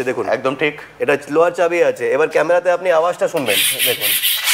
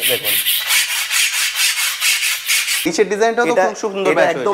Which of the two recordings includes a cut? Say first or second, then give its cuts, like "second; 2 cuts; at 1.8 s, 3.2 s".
second; 1 cut; at 2.8 s